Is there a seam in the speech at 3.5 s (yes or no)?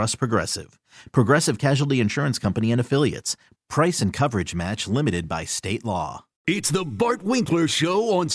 no